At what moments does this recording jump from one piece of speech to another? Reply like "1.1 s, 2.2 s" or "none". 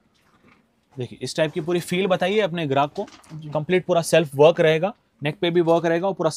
none